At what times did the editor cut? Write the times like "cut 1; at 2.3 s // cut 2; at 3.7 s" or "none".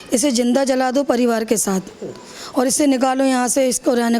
none